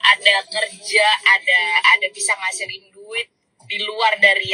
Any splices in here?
no; 0 cuts

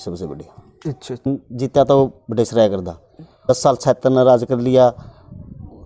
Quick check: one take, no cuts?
no; 2 cuts; at 1.3 s, 3.5 s

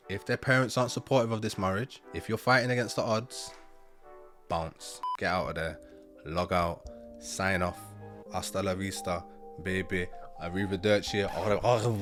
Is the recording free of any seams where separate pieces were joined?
yes; 0 cuts

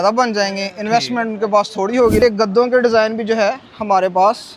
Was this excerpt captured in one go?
no; 1 cut; at 2.2 s

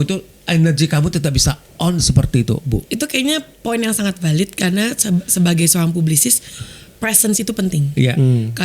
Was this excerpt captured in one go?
no; 1 cut; at 2.9 s

